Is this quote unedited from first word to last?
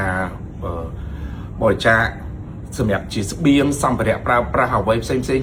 yes; 0 cuts

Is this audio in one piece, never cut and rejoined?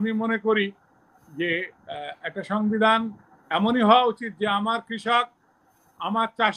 yes; 0 cuts

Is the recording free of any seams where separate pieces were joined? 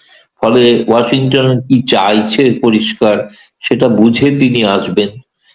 yes; 0 cuts

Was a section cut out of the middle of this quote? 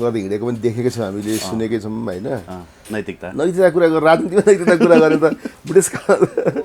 yes; 1 cut; at 2.9 s

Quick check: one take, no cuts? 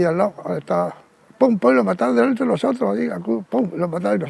yes; 0 cuts

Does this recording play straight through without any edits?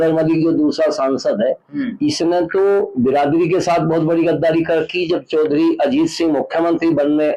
yes; 0 cuts

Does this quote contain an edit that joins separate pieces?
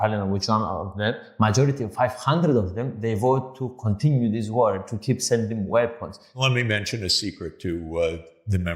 yes; 2 cuts; at 1.2 s, 6.4 s

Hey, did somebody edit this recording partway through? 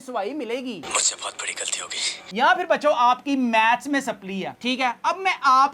no; 0 cuts

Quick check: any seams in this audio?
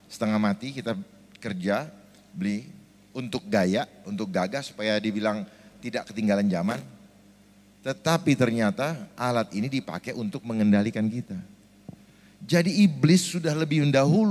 no; 0 cuts

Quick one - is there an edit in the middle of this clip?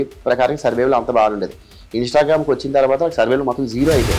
no; 0 cuts

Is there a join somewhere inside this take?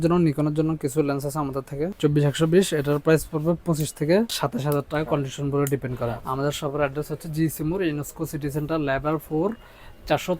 yes; 3 cuts; at 1.9 s, 4.4 s, 6.2 s

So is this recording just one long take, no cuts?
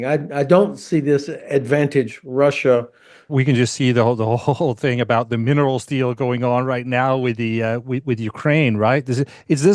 no; 1 cut; at 3.3 s

